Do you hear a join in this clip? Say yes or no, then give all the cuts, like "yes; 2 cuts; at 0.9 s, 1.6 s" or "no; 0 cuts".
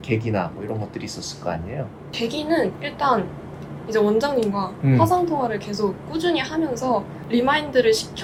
no; 0 cuts